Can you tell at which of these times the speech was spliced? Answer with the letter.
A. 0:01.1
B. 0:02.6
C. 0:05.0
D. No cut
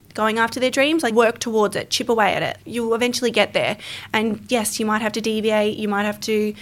A